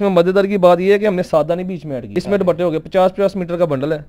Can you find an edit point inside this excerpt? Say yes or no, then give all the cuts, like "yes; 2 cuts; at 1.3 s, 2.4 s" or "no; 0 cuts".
yes; 1 cut; at 2.1 s